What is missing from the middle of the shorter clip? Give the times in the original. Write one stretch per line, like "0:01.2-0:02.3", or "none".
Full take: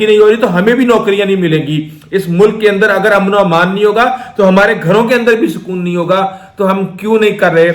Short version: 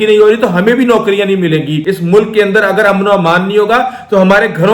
0:01.8-0:02.0